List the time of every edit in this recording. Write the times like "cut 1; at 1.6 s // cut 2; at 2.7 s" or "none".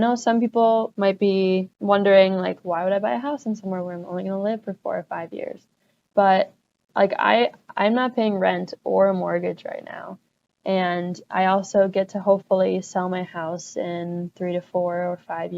cut 1; at 0.9 s // cut 2; at 1.7 s